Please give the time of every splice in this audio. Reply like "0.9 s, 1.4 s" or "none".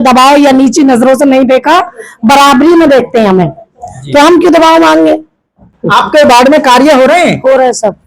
5.7 s

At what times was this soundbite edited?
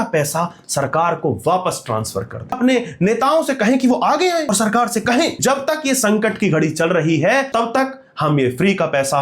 2.6 s, 4.5 s, 5.4 s, 7.5 s

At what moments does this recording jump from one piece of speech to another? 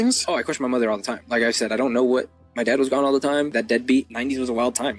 1.2 s, 3.9 s

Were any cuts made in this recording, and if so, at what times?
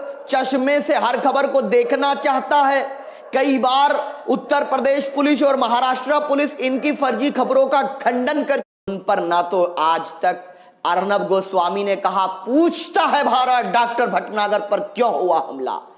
8.7 s

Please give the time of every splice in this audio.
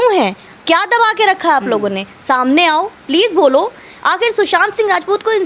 none

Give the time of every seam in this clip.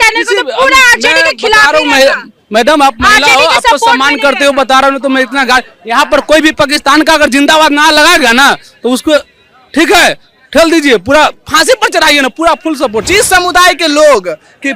13.0 s

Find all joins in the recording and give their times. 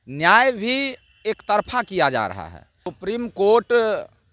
2.9 s

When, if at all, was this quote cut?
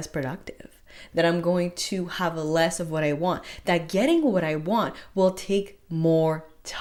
none

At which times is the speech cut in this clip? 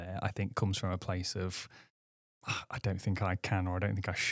none

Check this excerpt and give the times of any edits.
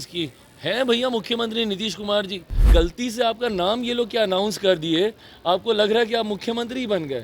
2.6 s

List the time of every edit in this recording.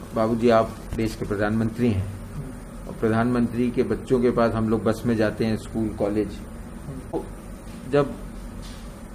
7.1 s

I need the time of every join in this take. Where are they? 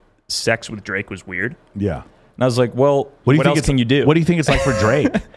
3.1 s

